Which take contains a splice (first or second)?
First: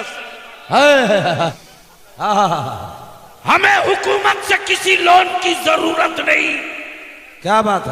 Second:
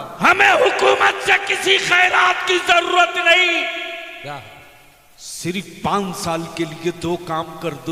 first